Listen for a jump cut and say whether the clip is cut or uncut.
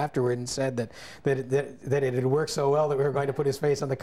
uncut